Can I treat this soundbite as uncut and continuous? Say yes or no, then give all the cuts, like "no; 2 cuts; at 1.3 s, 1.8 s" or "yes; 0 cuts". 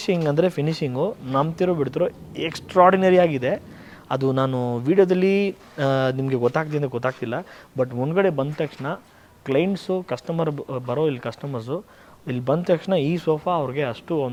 yes; 0 cuts